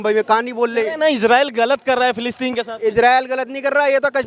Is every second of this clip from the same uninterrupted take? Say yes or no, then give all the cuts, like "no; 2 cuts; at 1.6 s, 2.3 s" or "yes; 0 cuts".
yes; 0 cuts